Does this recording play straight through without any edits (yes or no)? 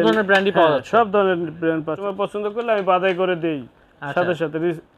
no